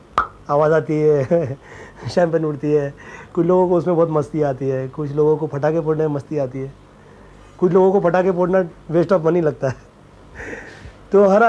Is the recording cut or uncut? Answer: uncut